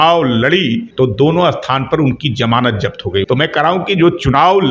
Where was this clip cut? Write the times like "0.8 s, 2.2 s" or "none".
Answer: 0.9 s, 3.2 s

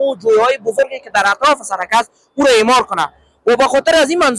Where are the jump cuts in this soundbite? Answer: none

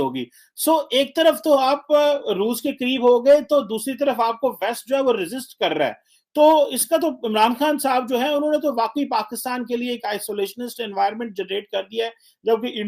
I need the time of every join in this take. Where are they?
none

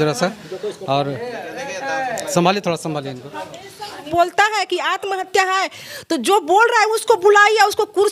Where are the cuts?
4.1 s

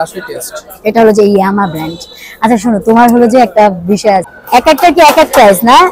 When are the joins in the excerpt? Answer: 4.3 s

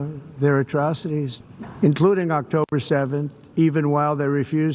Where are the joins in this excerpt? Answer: 1.4 s

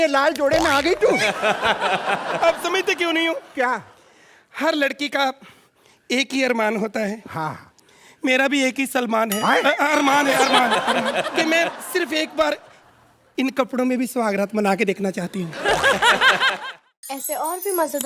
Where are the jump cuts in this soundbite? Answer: 16.5 s

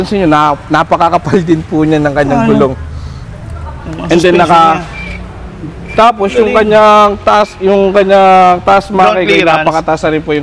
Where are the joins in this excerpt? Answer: none

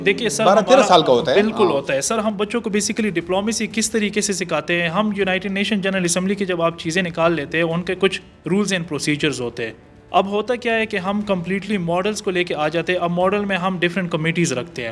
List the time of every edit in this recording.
none

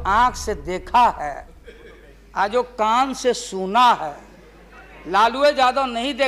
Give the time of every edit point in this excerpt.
none

